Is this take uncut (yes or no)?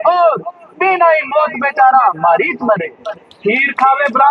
yes